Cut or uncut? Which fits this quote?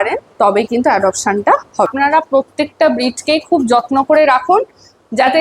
cut